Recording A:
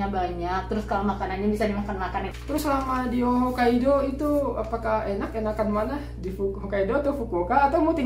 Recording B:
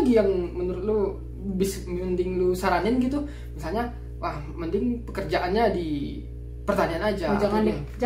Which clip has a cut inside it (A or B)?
A